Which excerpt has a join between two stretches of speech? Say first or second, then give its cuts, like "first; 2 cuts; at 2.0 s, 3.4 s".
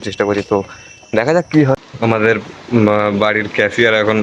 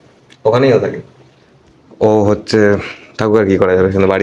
first; 1 cut; at 1.9 s